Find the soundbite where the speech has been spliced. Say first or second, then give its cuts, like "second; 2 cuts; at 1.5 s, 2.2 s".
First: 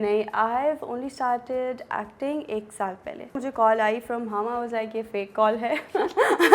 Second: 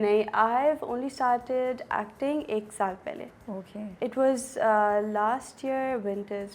first; 1 cut; at 3.4 s